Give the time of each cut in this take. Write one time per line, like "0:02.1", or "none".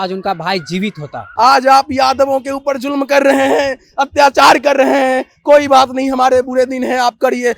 0:01.2